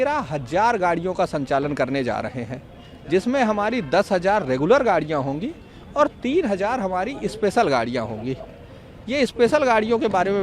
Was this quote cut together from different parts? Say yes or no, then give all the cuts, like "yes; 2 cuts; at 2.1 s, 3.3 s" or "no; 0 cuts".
no; 0 cuts